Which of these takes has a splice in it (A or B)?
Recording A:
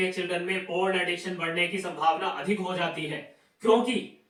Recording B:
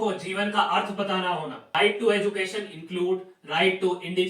B